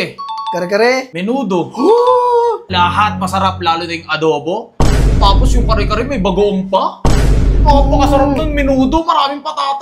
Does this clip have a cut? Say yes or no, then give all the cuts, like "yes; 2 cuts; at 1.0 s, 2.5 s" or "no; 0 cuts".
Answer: yes; 2 cuts; at 1.1 s, 2.7 s